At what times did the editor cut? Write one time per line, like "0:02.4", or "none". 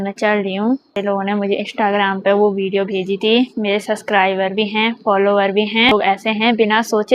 0:01.0
0:05.9